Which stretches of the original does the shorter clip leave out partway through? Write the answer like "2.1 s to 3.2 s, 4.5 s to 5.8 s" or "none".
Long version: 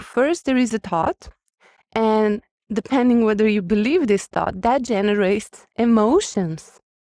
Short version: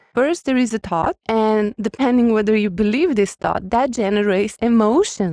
1.2 s to 1.9 s, 2.4 s to 2.7 s, 5.5 s to 5.7 s